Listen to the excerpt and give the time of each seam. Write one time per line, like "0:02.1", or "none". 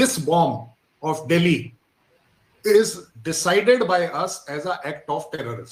none